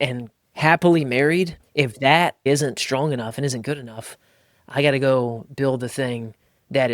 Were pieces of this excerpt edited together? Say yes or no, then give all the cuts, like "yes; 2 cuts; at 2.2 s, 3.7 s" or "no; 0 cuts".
yes; 2 cuts; at 1.6 s, 2.4 s